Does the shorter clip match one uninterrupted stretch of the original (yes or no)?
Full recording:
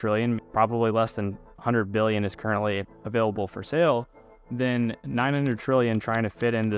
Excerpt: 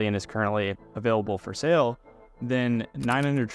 yes